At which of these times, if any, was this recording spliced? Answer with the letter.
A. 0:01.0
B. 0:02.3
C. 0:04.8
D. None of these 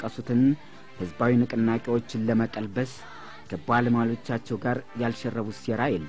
D